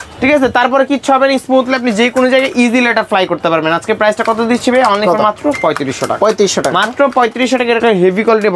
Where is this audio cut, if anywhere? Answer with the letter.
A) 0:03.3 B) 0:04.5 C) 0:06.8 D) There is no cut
D